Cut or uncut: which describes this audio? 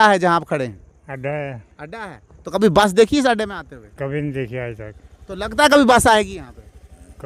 uncut